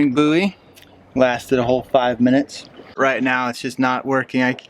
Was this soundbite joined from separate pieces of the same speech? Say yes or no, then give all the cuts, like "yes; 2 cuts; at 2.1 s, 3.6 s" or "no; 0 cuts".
yes; 1 cut; at 3.0 s